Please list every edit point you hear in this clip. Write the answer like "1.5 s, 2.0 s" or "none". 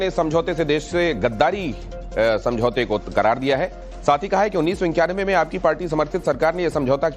2.7 s